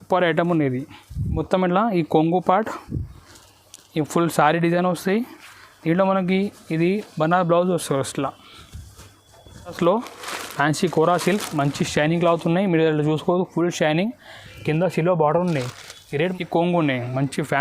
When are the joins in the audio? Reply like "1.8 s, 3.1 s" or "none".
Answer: 1.4 s, 9.8 s, 16.3 s